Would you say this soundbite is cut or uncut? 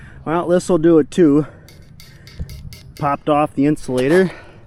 uncut